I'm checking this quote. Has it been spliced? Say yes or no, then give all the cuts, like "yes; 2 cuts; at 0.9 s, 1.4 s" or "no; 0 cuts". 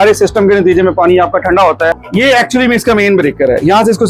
yes; 1 cut; at 2.0 s